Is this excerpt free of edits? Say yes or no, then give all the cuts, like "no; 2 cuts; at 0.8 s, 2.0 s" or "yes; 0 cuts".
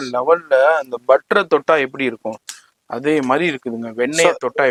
yes; 0 cuts